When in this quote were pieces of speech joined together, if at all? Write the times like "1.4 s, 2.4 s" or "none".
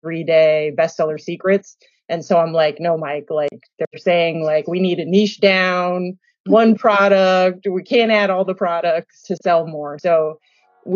9.2 s